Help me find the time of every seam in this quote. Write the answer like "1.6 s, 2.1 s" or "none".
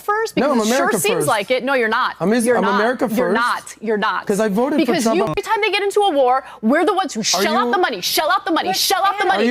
5.3 s